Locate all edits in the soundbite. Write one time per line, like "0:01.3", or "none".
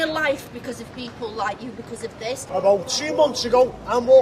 0:02.5